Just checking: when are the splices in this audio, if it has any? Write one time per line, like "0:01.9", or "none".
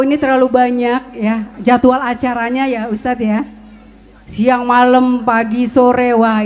none